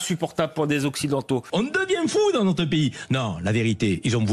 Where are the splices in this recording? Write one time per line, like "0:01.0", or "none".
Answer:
0:01.5